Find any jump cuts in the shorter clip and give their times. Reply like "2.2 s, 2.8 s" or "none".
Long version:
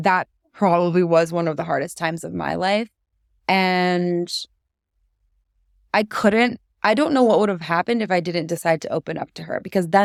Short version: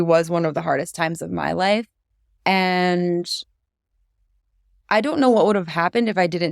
4.7 s